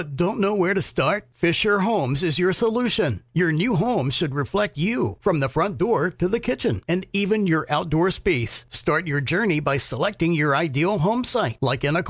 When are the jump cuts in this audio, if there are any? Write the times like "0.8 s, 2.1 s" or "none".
none